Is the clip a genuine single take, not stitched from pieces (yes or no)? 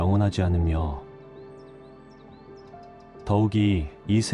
no